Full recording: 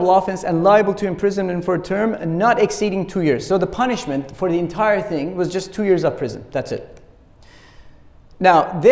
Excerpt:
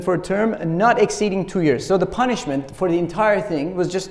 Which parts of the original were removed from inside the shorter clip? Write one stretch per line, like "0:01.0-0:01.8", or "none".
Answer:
none